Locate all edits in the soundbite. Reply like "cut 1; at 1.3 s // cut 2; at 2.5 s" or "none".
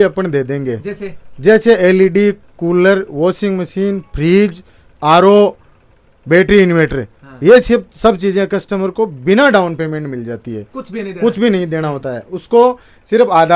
none